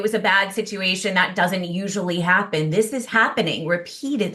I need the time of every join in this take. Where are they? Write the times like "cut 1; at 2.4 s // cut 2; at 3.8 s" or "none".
cut 1; at 3.1 s